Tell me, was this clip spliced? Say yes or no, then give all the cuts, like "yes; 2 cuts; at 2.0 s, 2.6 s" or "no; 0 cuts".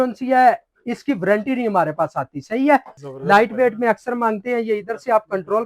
yes; 1 cut; at 3.0 s